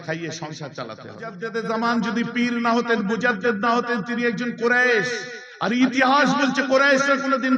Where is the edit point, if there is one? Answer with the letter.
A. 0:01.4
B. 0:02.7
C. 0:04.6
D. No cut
A